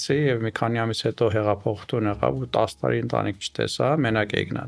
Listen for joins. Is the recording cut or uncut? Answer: uncut